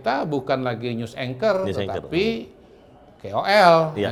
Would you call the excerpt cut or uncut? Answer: uncut